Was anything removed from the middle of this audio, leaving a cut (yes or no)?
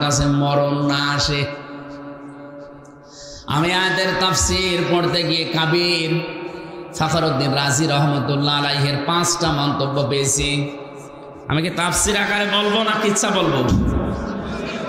no